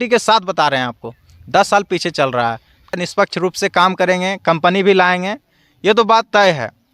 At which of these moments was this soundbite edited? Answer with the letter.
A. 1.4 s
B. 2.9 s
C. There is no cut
B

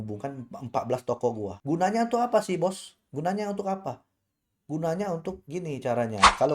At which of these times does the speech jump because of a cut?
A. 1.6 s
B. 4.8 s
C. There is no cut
A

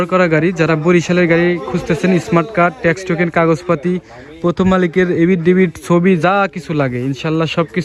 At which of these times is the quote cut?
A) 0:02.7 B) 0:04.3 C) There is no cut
C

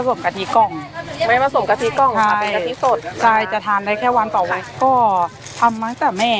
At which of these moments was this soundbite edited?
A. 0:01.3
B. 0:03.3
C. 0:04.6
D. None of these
C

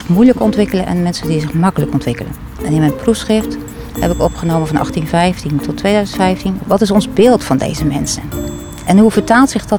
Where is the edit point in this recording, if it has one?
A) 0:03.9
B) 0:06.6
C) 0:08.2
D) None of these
B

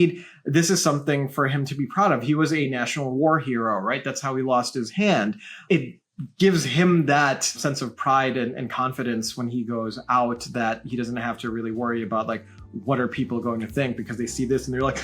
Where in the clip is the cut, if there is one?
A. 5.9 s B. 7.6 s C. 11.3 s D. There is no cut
B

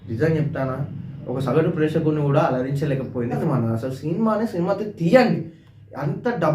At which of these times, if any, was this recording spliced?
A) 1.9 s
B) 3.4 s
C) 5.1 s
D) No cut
B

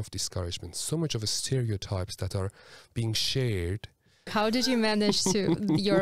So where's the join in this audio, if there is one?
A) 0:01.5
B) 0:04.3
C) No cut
B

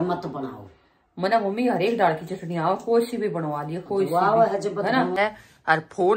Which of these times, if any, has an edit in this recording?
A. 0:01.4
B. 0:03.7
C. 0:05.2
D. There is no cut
C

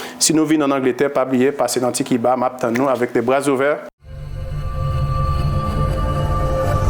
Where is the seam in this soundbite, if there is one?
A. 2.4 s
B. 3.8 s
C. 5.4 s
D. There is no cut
B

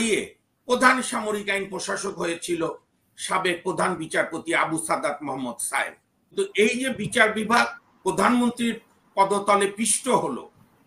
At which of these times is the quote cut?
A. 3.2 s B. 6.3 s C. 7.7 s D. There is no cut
B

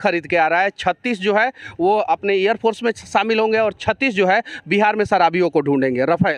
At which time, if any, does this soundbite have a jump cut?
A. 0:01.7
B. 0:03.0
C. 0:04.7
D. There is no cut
D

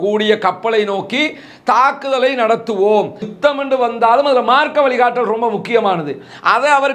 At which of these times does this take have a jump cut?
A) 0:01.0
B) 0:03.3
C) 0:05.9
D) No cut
B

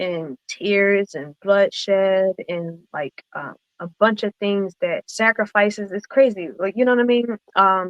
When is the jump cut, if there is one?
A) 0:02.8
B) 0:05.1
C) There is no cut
B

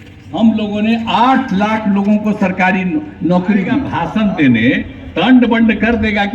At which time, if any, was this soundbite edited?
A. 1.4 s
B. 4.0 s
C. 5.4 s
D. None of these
B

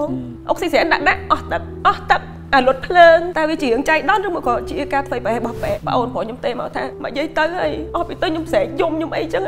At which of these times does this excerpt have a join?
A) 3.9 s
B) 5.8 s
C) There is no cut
B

